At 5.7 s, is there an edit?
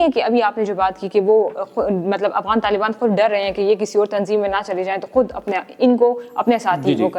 no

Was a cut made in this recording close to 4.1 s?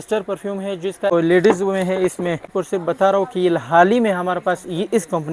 no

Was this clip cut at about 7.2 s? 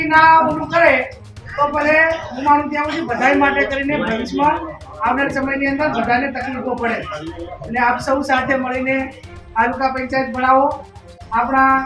no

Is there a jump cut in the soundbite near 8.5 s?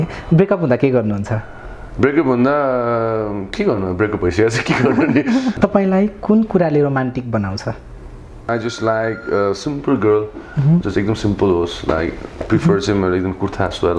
yes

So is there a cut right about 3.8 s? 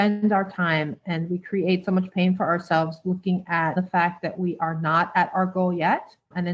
yes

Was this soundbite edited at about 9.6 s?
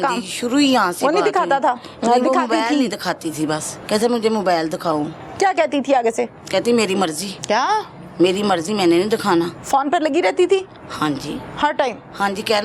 yes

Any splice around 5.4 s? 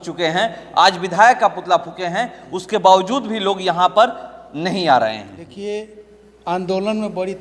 yes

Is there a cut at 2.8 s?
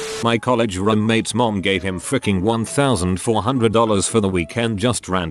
yes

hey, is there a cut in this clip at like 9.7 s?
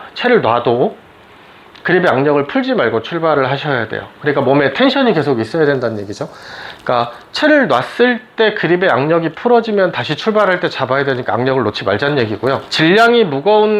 no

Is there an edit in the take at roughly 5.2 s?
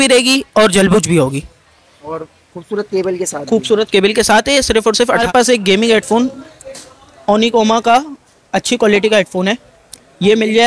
yes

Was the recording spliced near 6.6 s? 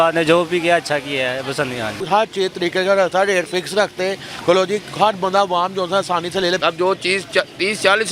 yes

